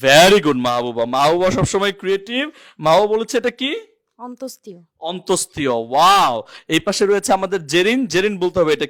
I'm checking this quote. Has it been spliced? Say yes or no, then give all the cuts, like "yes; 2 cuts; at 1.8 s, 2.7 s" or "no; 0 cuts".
no; 0 cuts